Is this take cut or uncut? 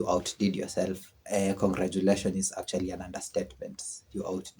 cut